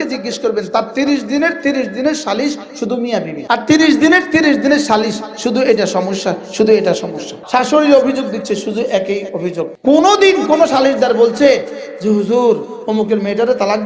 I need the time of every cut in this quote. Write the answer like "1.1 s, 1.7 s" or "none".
3.4 s, 7.3 s, 9.7 s

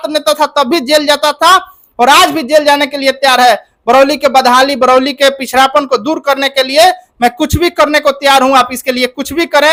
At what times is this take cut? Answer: none

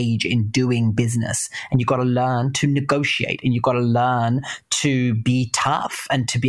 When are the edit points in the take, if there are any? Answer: none

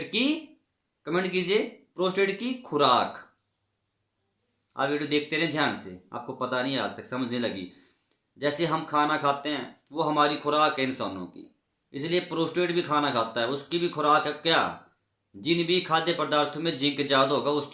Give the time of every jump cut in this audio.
none

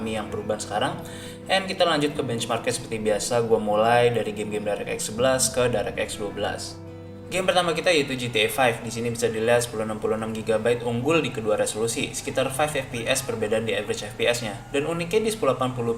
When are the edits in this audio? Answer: 7.1 s

